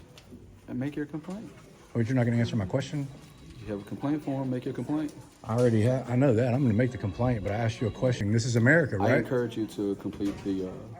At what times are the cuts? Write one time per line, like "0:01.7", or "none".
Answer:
0:08.2